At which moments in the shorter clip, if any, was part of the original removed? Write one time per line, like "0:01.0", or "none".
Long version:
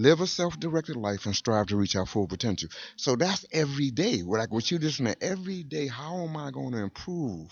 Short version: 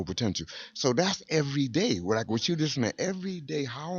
none